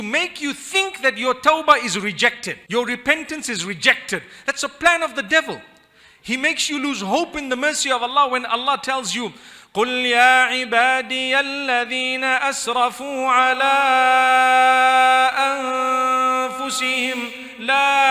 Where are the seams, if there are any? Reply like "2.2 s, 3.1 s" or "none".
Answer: none